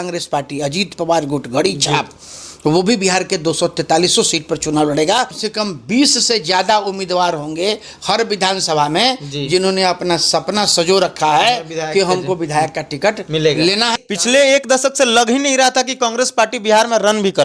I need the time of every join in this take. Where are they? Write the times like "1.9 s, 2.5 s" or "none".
5.4 s, 13.9 s